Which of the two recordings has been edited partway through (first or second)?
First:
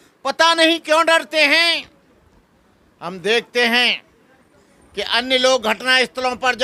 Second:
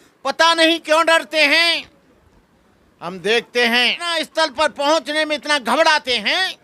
second